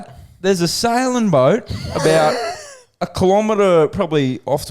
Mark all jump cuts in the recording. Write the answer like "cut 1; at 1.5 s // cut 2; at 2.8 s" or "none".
none

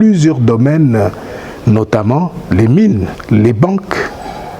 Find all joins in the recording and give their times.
cut 1; at 3.1 s

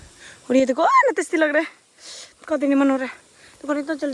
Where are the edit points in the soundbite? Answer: none

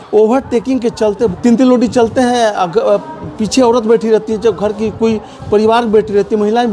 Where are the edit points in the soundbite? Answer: cut 1; at 1.3 s

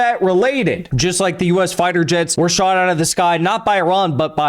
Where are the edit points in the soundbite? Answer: cut 1; at 0.9 s // cut 2; at 2.3 s

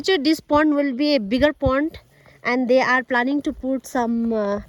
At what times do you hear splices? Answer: none

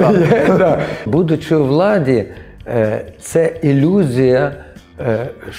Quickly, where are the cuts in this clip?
cut 1; at 1.1 s

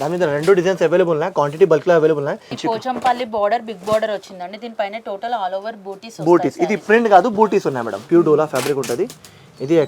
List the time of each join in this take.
cut 1; at 2.5 s // cut 2; at 7.9 s

